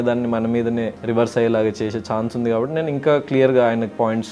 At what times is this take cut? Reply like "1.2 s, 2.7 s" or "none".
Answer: 1.0 s